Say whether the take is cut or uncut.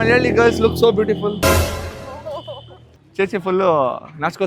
uncut